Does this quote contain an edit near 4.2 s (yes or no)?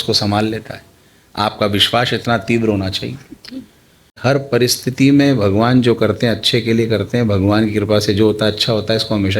yes